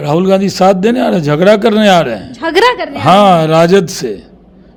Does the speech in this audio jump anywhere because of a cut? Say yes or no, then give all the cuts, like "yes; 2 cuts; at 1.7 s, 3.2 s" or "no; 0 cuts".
no; 0 cuts